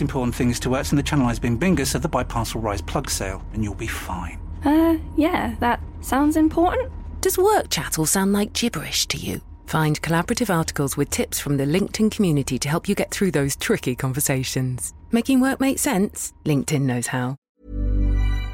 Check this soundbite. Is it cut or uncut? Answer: cut